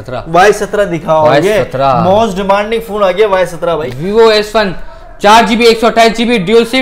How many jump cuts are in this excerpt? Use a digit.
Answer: 1